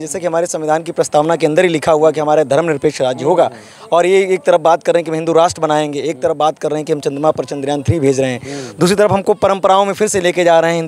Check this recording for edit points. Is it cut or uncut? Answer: uncut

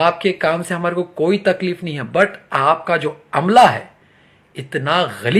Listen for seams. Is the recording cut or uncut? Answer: uncut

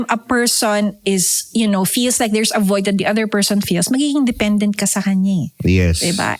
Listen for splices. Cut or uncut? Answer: uncut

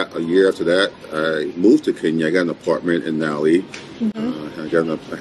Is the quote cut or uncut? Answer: uncut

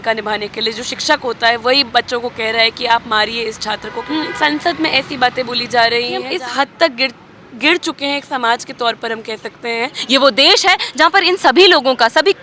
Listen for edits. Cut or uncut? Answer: cut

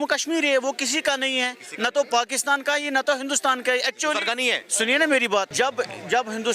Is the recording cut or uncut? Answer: cut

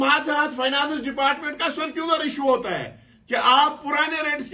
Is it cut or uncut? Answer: uncut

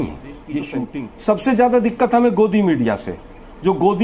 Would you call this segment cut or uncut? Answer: cut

